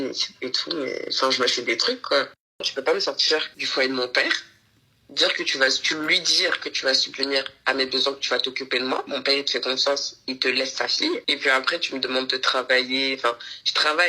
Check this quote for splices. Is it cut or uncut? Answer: cut